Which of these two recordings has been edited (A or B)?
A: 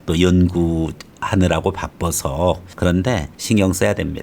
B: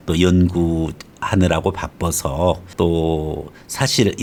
A